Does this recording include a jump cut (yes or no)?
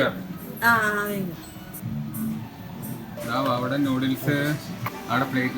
yes